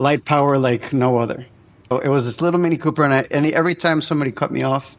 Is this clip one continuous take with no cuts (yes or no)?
no